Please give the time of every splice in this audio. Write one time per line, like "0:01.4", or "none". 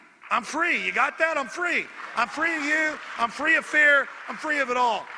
none